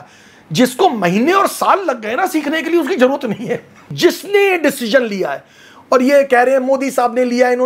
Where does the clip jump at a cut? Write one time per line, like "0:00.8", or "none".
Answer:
0:03.9